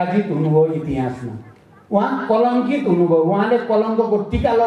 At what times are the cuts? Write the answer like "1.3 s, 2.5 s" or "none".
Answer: none